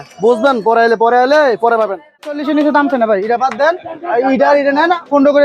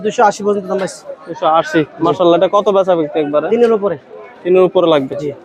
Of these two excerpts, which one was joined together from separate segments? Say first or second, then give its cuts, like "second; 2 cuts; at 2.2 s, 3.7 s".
first; 1 cut; at 2.4 s